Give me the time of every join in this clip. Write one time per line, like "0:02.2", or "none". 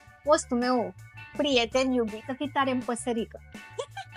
0:02.1